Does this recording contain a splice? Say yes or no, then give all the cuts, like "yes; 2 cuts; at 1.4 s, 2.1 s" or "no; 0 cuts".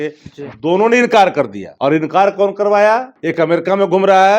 yes; 2 cuts; at 1.6 s, 3.2 s